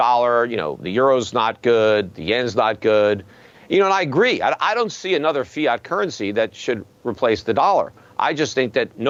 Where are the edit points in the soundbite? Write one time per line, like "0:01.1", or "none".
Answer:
none